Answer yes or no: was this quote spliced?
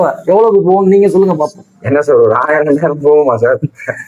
no